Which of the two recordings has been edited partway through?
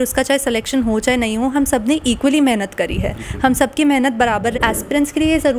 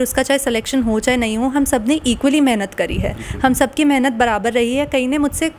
first; 1 cut; at 4.6 s

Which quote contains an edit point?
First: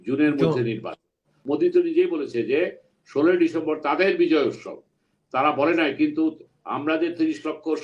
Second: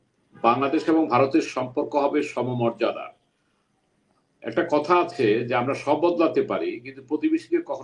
first; 1 cut; at 1.3 s

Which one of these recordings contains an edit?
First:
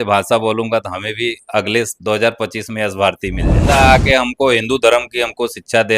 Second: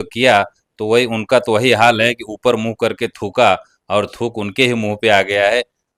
first; 1 cut; at 3.6 s

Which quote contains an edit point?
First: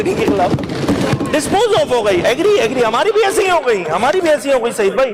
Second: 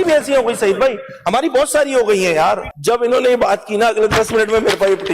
second; 1 cut; at 2.7 s

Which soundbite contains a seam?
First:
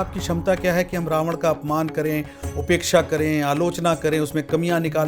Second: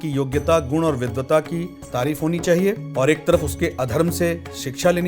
second; 2 cuts; at 1.8 s, 2.8 s

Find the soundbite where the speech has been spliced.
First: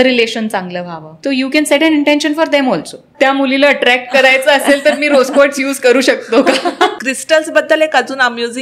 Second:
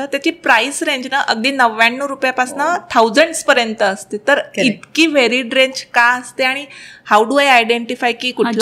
first; 3 cuts; at 1.1 s, 3.1 s, 6.9 s

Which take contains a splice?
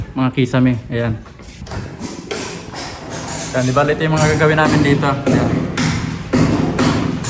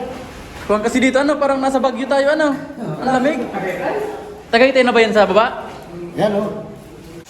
first; 1 cut; at 1.6 s

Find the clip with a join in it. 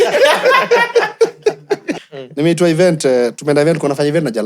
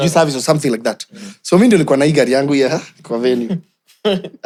first; 1 cut; at 1.9 s

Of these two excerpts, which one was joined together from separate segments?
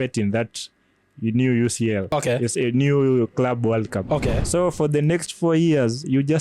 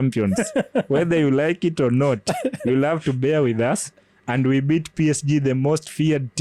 first; 1 cut; at 4.0 s

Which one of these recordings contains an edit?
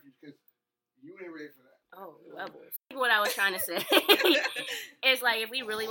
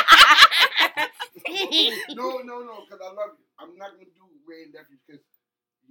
first; 1 cut; at 2.7 s

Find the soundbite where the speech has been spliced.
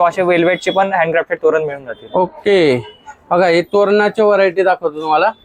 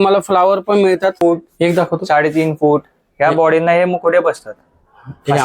second; 1 cut; at 1.2 s

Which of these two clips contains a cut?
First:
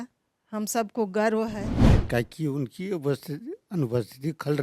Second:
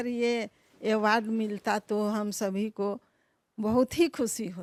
first; 1 cut; at 1.9 s

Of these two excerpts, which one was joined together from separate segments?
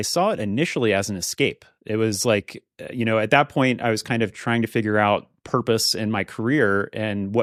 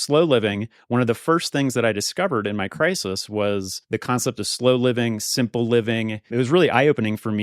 second; 2 cuts; at 3.8 s, 6.2 s

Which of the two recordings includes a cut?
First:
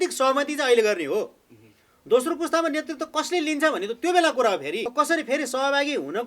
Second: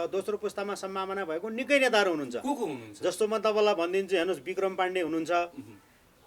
first; 1 cut; at 4.9 s

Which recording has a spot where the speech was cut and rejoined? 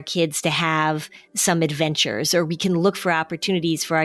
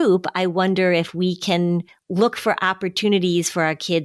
second; 1 cut; at 2.0 s

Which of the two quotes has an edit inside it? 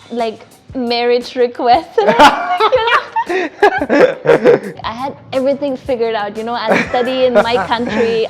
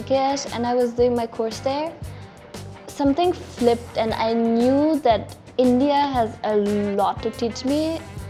first; 1 cut; at 4.7 s

